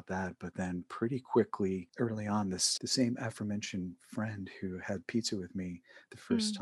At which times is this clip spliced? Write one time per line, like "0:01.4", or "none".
0:01.9